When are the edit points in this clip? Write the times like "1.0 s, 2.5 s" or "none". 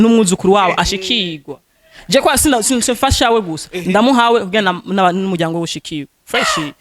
none